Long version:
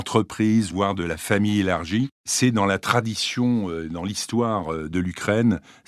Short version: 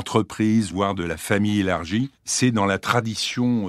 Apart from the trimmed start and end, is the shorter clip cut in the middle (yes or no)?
no